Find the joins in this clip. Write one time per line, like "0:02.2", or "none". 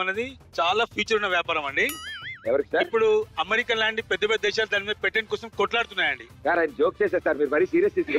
0:06.2